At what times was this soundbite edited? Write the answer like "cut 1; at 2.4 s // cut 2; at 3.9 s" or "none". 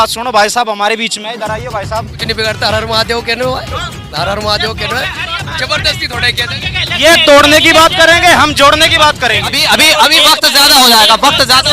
cut 1; at 2.2 s // cut 2; at 9.6 s